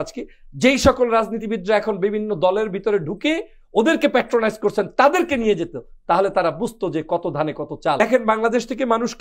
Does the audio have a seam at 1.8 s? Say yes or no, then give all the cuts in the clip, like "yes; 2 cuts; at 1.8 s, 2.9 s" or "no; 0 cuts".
no; 1 cut; at 8.0 s